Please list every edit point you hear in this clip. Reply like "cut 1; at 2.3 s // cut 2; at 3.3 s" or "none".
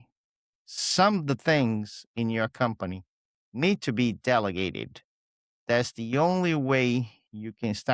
none